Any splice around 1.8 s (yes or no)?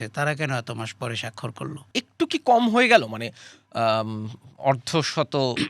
yes